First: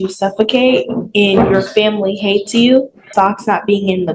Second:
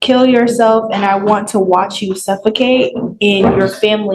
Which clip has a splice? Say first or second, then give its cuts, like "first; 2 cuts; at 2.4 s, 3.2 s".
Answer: first; 1 cut; at 3.1 s